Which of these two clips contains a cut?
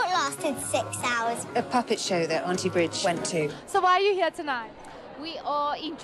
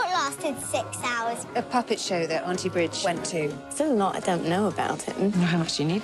second; 1 cut; at 3.6 s

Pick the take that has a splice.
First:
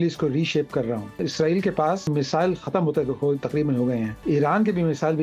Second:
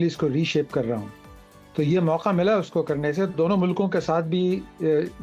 first; 3 cuts; at 1.2 s, 2.1 s, 4.1 s

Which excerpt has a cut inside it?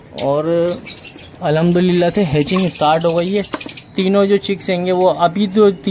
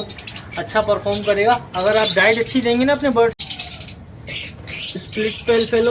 second; 1 cut; at 3.4 s

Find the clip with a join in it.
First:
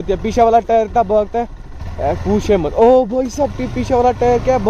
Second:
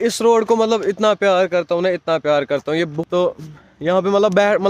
second; 1 cut; at 3.0 s

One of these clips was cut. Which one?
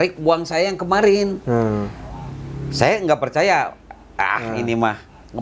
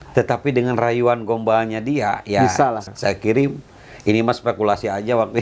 second; 1 cut; at 2.9 s

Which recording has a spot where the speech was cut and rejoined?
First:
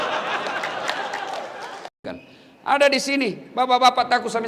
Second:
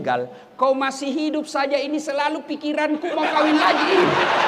first; 1 cut; at 2.0 s

